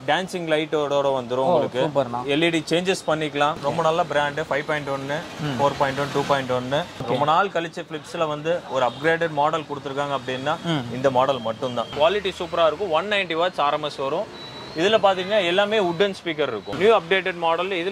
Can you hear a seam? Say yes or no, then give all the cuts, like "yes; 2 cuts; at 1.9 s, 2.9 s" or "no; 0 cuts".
yes; 4 cuts; at 3.6 s, 7.0 s, 11.8 s, 16.7 s